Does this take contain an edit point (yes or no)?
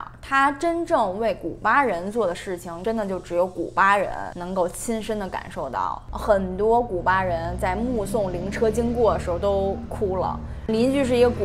yes